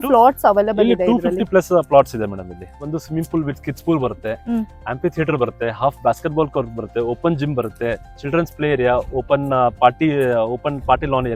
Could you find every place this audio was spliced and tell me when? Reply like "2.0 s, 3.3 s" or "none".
2.8 s